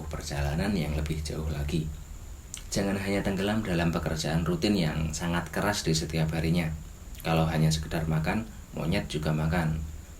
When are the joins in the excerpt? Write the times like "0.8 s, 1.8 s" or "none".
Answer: 2.5 s